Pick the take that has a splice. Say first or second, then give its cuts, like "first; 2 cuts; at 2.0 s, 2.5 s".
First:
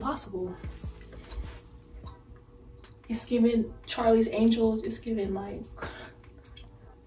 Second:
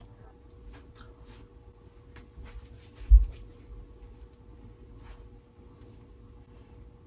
first; 1 cut; at 1.1 s